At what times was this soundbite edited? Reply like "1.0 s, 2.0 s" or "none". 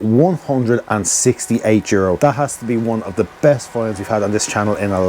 2.2 s